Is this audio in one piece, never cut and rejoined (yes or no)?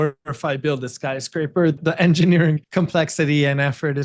no